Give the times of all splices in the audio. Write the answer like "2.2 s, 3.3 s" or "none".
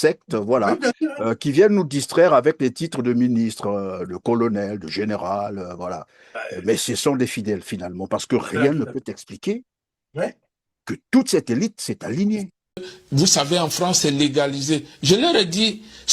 12.9 s